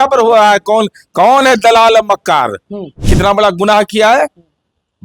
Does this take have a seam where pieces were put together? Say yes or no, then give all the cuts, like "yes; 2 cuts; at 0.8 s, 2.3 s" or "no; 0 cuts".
yes; 1 cut; at 3.0 s